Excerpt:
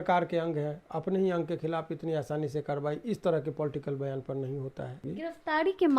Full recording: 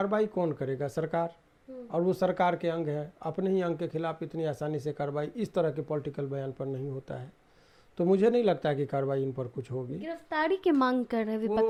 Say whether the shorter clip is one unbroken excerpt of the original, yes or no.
no